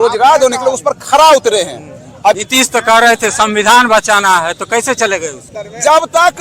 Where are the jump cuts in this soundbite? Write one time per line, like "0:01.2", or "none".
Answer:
0:02.4
0:05.4